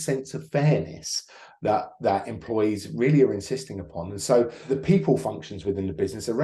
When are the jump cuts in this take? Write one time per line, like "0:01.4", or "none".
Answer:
0:04.7